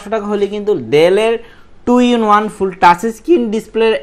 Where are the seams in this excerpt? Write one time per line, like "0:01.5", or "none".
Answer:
none